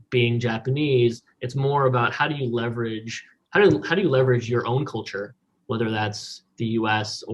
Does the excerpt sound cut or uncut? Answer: uncut